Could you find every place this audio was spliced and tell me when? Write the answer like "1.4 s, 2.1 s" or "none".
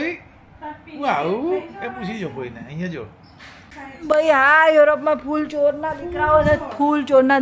3.7 s